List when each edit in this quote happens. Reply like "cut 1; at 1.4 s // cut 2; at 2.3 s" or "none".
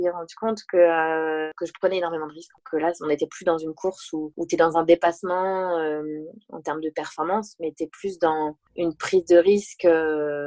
none